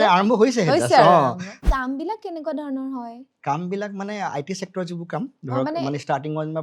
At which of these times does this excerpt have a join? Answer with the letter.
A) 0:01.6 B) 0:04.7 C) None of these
A